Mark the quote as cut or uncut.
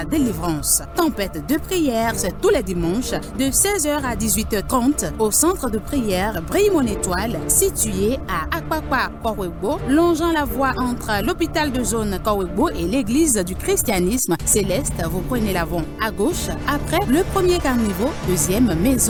uncut